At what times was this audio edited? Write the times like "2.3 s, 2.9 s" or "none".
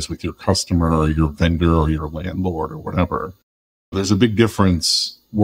3.9 s